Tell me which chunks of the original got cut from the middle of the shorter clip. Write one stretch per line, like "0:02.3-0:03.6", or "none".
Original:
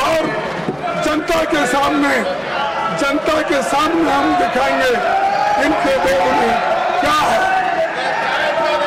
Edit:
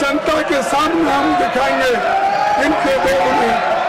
none